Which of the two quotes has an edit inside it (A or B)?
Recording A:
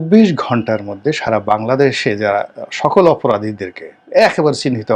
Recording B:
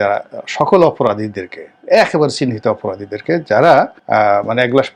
B